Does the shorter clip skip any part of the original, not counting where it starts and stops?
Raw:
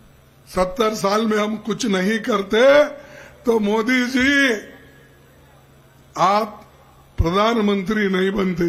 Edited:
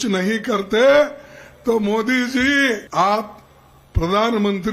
yes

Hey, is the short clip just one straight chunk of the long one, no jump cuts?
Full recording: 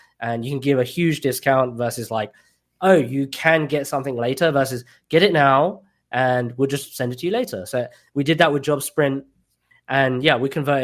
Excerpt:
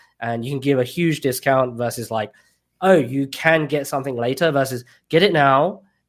yes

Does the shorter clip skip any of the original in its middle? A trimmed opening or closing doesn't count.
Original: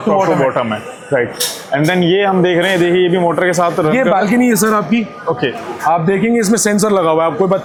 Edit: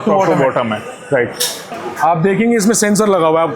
yes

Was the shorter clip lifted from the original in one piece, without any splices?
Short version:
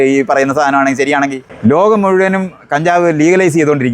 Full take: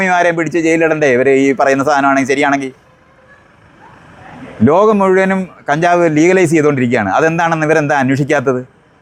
no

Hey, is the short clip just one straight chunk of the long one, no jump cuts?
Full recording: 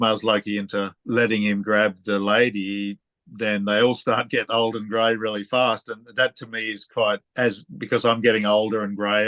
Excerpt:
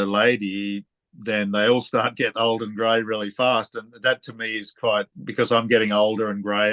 no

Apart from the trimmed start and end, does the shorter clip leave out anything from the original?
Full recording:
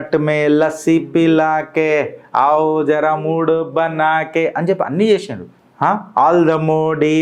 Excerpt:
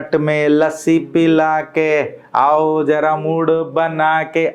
no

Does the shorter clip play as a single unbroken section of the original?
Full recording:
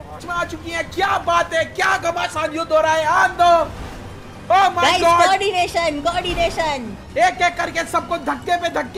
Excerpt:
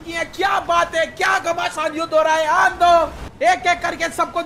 no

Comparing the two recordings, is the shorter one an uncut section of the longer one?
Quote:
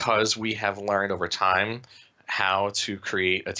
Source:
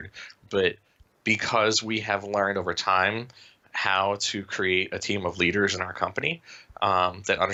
yes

